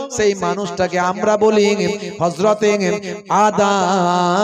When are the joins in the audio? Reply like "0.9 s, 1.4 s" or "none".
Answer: none

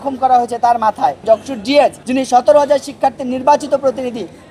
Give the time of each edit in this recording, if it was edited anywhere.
1.2 s, 2.0 s

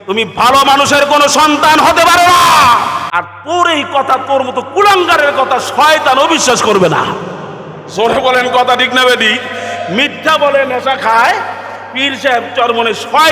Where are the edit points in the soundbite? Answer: 3.0 s

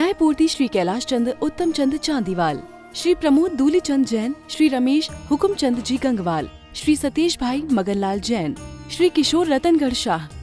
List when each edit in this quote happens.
none

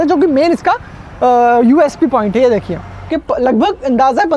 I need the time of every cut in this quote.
3.1 s

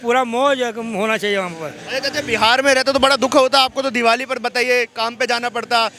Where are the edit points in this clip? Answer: none

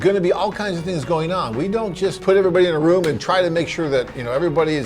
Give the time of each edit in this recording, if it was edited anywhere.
2.2 s

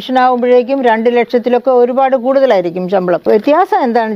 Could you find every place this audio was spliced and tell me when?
3.3 s

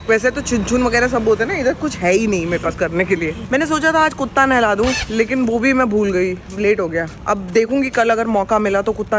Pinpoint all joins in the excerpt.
none

